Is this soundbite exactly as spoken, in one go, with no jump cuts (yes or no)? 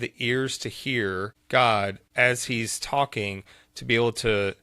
no